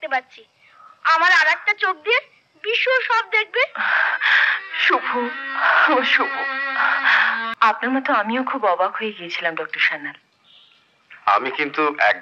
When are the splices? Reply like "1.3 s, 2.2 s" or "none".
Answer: 7.5 s

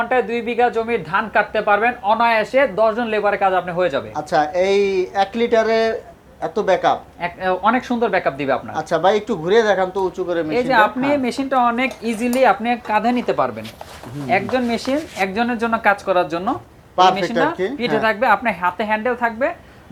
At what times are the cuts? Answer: none

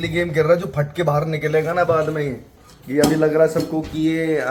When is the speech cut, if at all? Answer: none

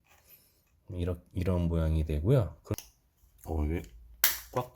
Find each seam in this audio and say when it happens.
2.8 s

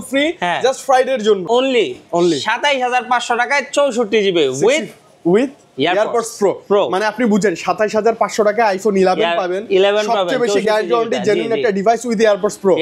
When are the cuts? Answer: 1.4 s

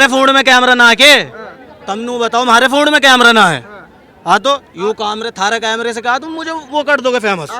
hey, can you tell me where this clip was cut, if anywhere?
none

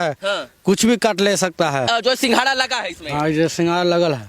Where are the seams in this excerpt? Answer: 1.9 s

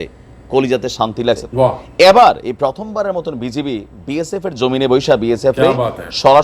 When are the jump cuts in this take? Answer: 1.4 s

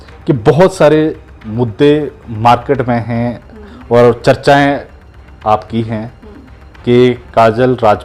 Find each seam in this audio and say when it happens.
none

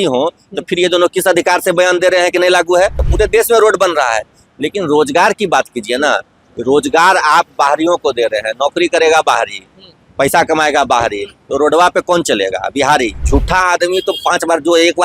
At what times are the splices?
3.0 s, 13.2 s

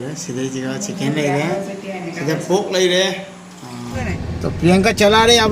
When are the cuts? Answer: 4.0 s

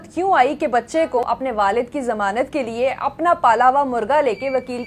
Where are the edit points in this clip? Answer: 1.2 s

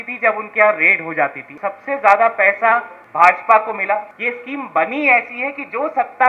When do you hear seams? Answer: 1.4 s, 3.0 s, 4.1 s

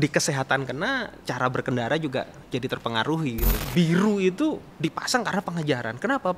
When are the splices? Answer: 1.2 s, 3.5 s

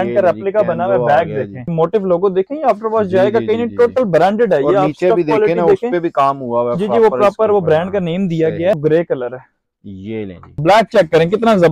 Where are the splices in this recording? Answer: 1.7 s, 8.8 s, 10.6 s

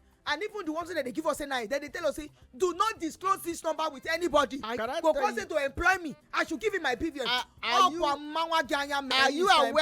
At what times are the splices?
4.7 s

